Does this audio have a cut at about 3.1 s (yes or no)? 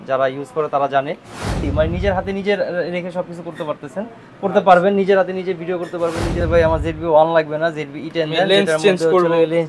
no